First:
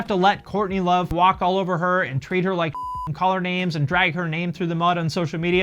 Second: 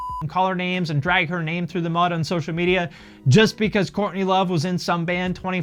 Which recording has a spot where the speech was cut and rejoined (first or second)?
first